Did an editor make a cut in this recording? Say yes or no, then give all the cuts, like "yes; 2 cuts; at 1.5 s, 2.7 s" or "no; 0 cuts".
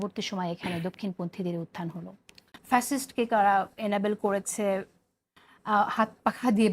yes; 1 cut; at 2.5 s